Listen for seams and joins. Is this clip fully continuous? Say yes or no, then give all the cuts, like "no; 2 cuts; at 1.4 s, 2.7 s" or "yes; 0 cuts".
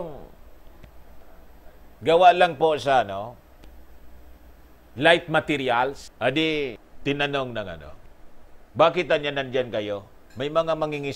no; 2 cuts; at 6.1 s, 6.9 s